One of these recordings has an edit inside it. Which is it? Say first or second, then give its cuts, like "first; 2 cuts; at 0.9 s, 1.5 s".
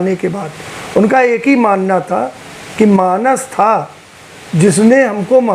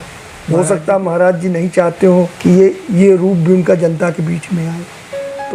second; 1 cut; at 2.3 s